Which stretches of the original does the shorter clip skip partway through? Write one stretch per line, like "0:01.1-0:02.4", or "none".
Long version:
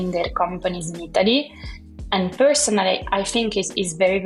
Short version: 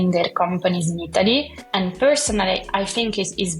0:01.6-0:02.0